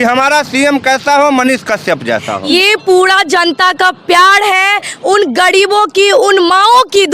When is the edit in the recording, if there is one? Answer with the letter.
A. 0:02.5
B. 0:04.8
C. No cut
A